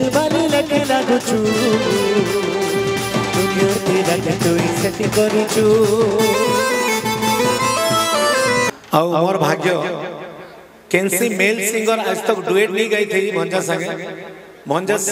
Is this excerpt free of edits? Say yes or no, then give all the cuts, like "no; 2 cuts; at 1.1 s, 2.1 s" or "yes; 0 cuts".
no; 1 cut; at 8.7 s